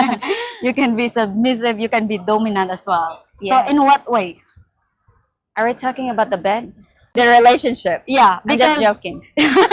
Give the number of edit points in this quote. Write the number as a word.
one